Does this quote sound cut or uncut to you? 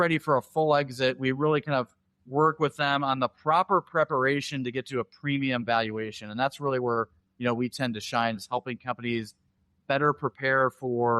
uncut